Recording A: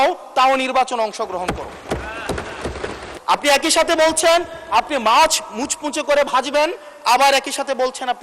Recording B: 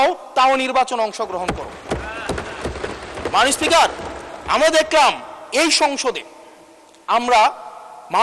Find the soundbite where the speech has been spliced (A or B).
A